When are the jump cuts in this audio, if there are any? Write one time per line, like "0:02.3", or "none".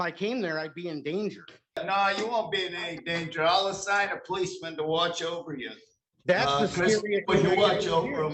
0:01.8